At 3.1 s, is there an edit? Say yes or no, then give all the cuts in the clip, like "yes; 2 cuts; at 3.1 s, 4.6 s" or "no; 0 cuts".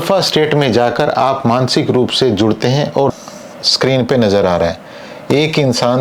yes; 1 cut; at 3.1 s